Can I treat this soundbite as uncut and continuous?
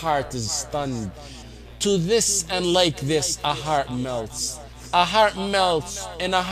no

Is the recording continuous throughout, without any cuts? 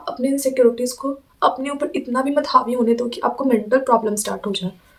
yes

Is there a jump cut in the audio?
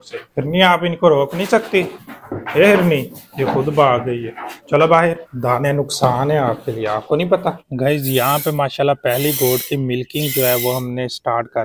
yes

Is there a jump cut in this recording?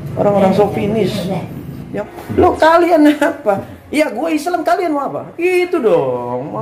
yes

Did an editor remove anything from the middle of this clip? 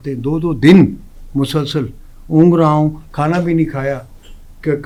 no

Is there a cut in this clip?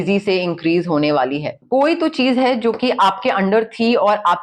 yes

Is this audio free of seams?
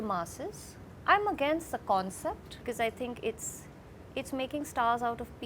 no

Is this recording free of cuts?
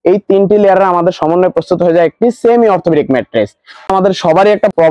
no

